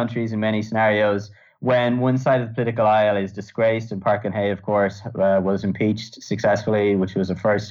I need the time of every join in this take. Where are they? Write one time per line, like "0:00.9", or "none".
none